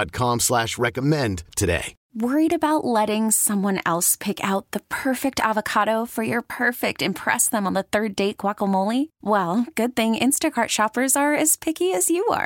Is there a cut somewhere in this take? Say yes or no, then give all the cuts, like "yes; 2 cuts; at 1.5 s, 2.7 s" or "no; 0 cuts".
yes; 1 cut; at 2.0 s